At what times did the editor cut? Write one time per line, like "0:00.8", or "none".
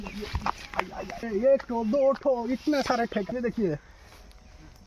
0:01.3
0:03.3